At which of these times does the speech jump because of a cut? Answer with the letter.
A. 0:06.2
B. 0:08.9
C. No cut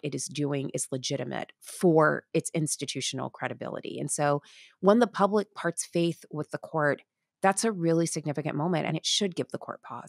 B